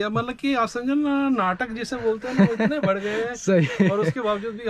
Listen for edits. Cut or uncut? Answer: uncut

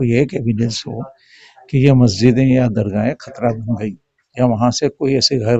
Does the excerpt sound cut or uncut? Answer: uncut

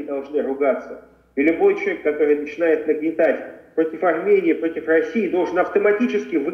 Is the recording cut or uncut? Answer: uncut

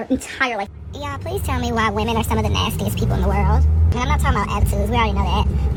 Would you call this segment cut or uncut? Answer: uncut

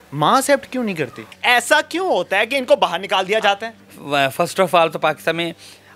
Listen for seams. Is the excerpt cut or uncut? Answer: cut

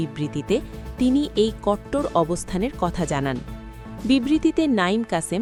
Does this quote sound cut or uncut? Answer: uncut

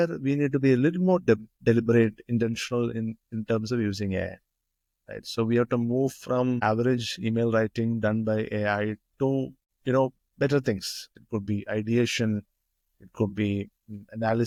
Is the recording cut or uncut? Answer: uncut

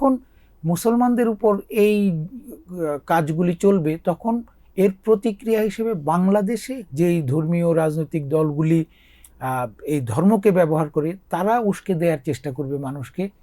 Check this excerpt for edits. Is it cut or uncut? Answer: cut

